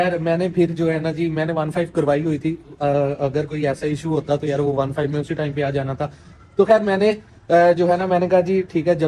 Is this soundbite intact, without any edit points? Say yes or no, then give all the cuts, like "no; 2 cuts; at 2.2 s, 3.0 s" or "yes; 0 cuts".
yes; 0 cuts